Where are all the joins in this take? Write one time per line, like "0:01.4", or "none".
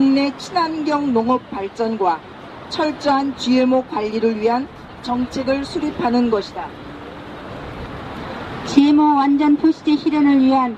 none